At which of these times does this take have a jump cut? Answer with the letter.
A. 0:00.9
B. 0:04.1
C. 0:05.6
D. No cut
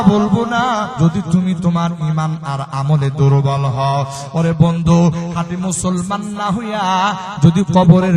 A